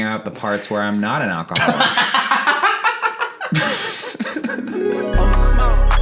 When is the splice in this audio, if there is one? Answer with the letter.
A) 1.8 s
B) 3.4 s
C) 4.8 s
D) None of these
C